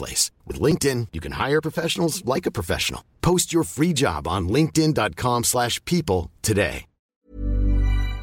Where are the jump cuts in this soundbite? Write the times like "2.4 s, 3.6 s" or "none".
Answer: 7.1 s